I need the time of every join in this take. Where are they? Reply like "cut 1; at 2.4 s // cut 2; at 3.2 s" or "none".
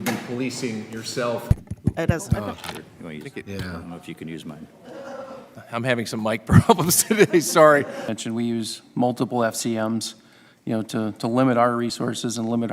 cut 1; at 1.5 s // cut 2; at 8.2 s